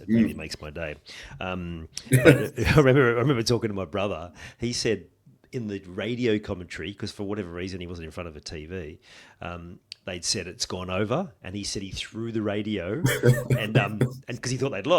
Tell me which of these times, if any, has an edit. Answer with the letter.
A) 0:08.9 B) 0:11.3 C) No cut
C